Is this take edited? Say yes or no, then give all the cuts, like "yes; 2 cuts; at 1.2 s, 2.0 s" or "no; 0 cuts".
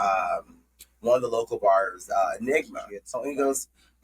yes; 1 cut; at 3.1 s